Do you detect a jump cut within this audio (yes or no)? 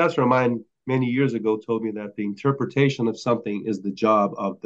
no